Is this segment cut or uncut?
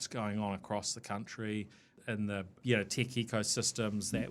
cut